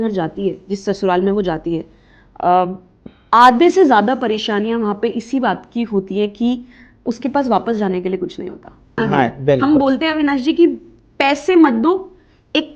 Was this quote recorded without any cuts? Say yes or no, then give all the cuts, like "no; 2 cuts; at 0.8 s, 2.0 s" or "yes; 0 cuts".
no; 1 cut; at 9.0 s